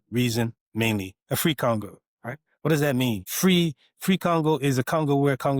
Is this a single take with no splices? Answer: no; 1 cut; at 3.3 s

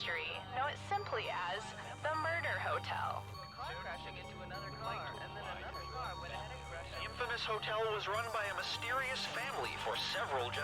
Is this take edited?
no; 0 cuts

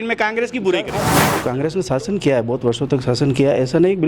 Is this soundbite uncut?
no; 1 cut; at 1.2 s

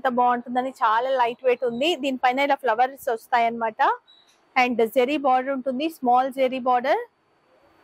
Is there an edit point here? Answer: no; 0 cuts

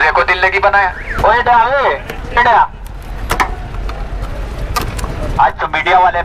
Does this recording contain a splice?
yes; 1 cut; at 1.0 s

